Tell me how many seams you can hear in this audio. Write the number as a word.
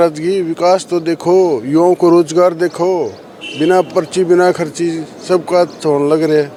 zero